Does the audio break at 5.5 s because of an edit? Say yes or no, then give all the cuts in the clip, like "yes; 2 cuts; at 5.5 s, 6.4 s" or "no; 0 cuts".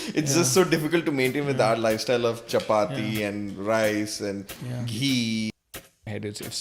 yes; 1 cut; at 5.5 s